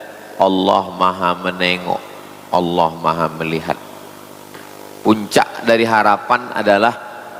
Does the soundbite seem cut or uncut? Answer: uncut